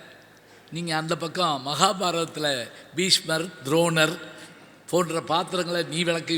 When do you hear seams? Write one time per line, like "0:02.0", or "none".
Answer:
none